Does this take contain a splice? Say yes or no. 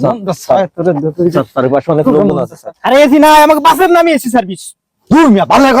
yes